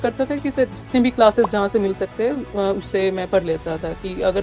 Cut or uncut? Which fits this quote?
uncut